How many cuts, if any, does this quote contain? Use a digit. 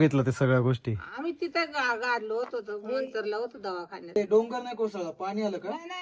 1